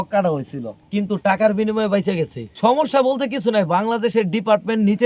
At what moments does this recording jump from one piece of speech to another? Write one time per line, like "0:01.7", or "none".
0:02.4